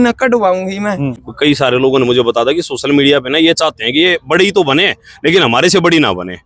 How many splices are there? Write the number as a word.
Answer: one